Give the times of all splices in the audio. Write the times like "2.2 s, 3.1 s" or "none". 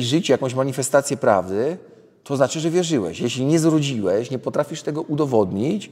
none